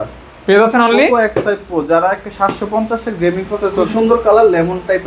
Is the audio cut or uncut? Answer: cut